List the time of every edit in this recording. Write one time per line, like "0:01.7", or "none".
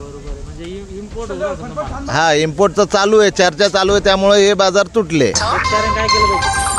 0:05.4